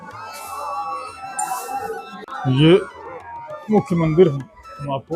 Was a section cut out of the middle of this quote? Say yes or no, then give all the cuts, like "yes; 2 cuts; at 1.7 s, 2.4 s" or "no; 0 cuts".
yes; 1 cut; at 2.2 s